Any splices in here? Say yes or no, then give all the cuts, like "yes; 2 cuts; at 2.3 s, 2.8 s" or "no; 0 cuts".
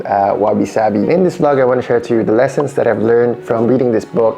yes; 1 cut; at 1.1 s